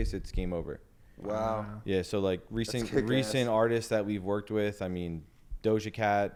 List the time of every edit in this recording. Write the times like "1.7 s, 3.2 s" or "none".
none